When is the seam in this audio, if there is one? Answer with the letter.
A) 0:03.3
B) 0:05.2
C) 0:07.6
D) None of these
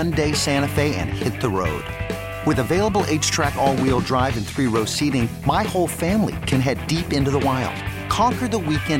D